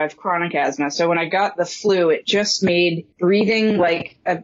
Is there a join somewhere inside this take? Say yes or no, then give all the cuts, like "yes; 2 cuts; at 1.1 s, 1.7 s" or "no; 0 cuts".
yes; 1 cut; at 3.1 s